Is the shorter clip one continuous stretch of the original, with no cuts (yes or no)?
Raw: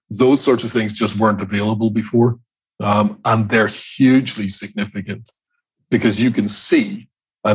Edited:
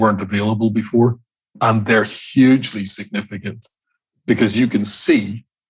no